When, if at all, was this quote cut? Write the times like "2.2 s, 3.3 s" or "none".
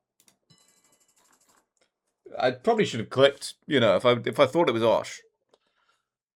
none